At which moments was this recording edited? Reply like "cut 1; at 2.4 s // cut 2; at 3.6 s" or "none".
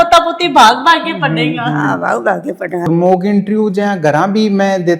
cut 1; at 2.9 s

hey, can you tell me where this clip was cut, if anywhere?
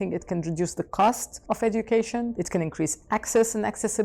cut 1; at 1.3 s // cut 2; at 2.4 s

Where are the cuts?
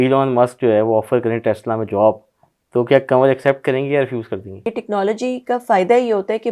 cut 1; at 4.7 s

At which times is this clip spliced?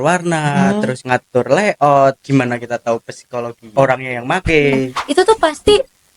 cut 1; at 1.0 s // cut 2; at 2.2 s // cut 3; at 3.7 s // cut 4; at 5.0 s

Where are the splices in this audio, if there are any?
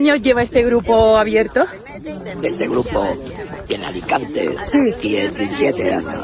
none

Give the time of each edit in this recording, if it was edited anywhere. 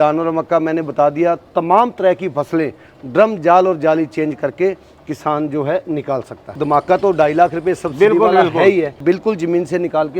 cut 1; at 6.6 s // cut 2; at 9.0 s

